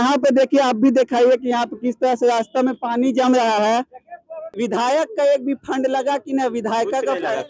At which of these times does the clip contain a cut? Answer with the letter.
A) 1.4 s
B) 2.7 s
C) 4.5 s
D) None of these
C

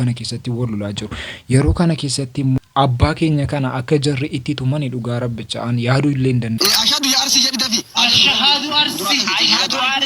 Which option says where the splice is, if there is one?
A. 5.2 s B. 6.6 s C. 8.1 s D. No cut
B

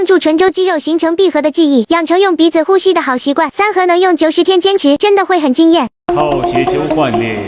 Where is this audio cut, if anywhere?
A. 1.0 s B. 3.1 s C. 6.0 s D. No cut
C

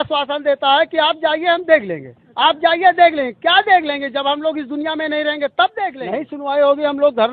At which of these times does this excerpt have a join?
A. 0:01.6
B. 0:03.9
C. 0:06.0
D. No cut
C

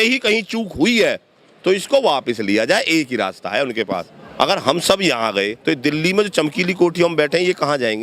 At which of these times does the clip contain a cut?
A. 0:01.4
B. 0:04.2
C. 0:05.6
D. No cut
B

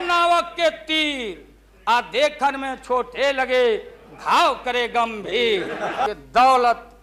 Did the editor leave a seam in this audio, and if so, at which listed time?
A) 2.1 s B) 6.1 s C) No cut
B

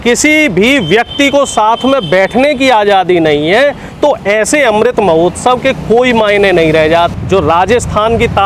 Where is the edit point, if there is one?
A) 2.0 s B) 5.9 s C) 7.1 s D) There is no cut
C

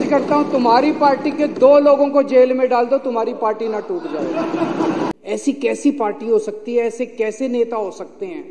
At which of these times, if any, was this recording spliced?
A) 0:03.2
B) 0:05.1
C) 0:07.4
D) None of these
B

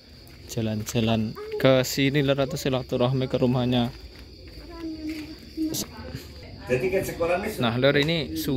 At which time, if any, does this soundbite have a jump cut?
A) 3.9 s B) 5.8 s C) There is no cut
B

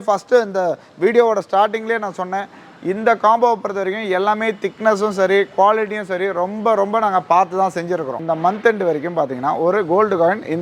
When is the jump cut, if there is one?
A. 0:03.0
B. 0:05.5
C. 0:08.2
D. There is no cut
C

